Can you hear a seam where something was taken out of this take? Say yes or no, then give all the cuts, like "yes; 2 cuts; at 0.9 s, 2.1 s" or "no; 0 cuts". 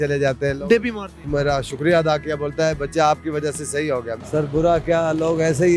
yes; 2 cuts; at 1.3 s, 4.2 s